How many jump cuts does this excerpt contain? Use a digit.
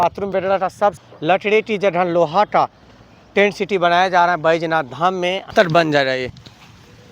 2